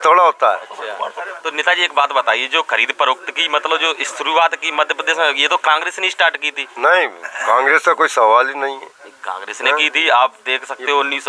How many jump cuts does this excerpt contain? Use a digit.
0